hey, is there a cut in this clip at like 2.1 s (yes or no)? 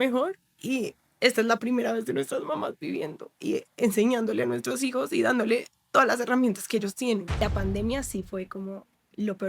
no